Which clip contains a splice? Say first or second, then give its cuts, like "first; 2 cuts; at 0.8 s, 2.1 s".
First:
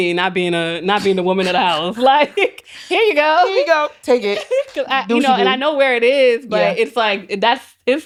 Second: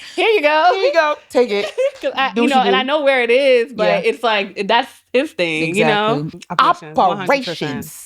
second; 1 cut; at 6.4 s